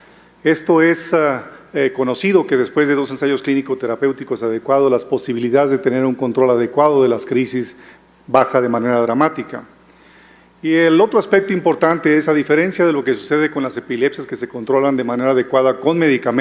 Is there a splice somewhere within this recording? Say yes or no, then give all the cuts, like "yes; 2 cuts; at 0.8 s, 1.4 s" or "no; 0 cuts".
yes; 1 cut; at 6.7 s